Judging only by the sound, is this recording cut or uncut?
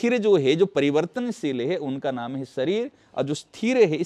uncut